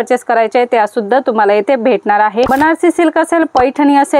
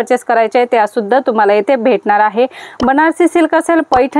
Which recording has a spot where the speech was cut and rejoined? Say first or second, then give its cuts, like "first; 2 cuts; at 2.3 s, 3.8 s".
first; 1 cut; at 2.5 s